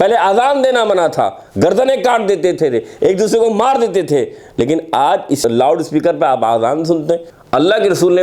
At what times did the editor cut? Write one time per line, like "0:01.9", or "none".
0:05.4
0:07.3